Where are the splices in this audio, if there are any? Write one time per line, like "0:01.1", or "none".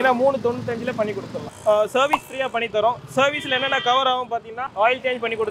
0:01.3
0:04.6